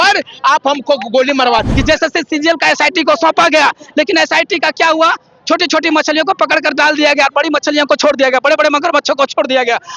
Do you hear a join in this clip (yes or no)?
yes